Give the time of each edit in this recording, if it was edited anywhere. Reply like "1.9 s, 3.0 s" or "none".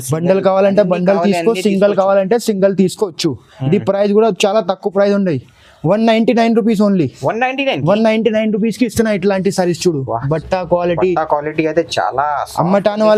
none